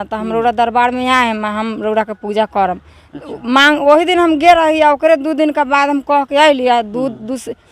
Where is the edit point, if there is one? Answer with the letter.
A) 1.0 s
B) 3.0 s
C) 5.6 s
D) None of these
D